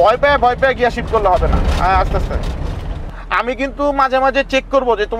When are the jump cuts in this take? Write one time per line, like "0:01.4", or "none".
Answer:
0:03.1